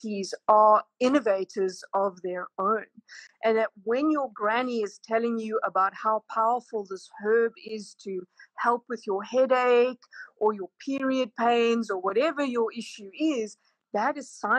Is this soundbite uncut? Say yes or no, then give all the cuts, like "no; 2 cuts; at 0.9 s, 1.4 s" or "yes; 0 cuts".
yes; 0 cuts